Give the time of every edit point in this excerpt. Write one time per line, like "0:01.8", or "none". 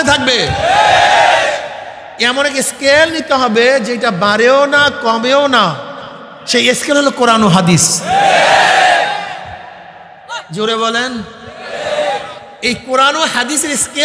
none